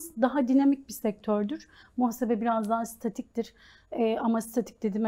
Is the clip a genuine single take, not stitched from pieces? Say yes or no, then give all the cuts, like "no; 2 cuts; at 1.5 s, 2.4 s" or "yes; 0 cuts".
yes; 0 cuts